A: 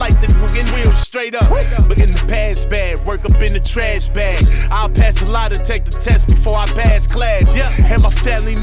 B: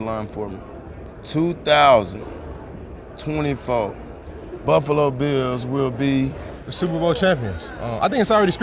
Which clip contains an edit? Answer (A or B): B